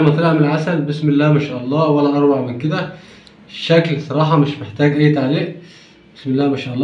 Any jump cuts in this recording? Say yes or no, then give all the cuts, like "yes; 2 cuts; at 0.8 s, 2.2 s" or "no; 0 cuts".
no; 0 cuts